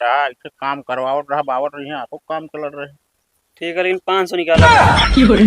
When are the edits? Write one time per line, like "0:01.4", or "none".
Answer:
0:04.6